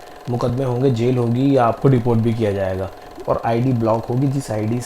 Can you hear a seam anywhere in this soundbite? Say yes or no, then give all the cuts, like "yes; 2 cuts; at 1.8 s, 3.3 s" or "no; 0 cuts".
yes; 1 cut; at 3.0 s